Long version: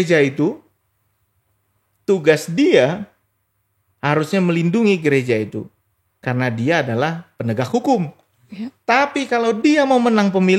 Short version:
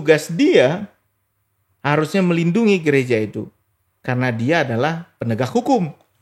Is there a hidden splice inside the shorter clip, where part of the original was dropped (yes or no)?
no